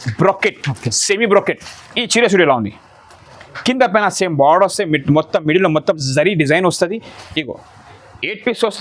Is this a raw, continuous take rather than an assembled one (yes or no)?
yes